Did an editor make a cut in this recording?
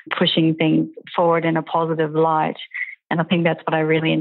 no; 0 cuts

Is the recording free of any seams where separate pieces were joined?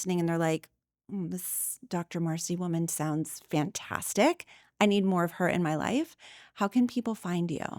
yes; 0 cuts

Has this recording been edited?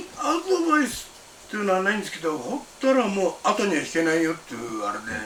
no; 0 cuts

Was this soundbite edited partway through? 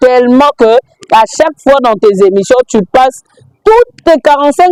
no; 0 cuts

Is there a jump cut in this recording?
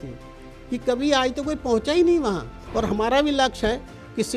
yes; 1 cut; at 2.6 s

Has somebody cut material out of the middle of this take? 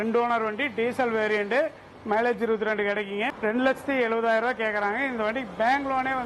no; 0 cuts

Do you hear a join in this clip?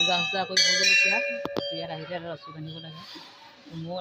no; 0 cuts

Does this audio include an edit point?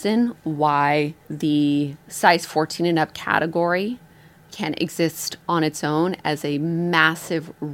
yes; 3 cuts; at 1.2 s, 2.0 s, 4.5 s

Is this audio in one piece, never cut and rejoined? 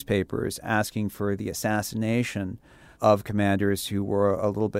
no; 1 cut; at 2.9 s

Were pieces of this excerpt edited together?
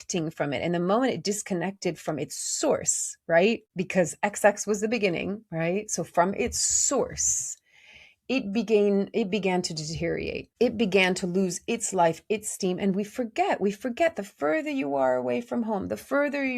yes; 2 cuts; at 3.7 s, 10.4 s

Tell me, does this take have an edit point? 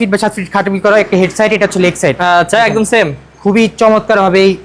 no; 0 cuts

